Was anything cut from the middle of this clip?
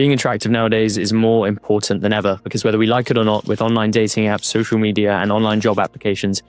no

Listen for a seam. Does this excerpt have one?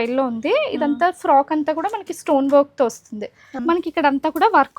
yes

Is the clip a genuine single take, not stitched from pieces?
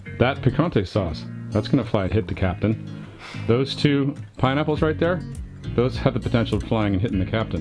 no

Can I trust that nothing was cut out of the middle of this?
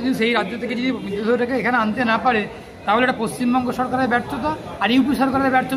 yes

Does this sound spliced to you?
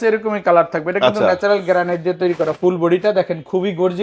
no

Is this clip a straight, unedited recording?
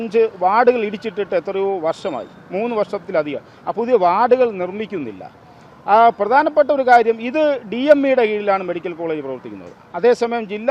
yes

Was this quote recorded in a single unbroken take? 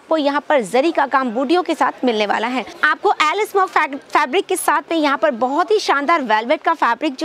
no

